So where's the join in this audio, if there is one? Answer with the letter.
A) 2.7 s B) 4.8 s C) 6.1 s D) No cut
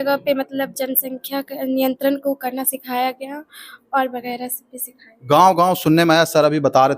D